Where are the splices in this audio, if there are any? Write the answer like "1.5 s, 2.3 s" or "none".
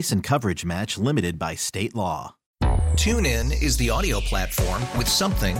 2.4 s